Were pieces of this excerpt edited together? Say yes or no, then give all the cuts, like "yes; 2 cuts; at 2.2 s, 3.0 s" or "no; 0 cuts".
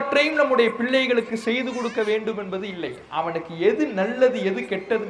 no; 0 cuts